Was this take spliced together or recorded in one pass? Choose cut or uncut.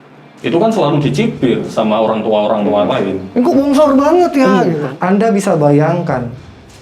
cut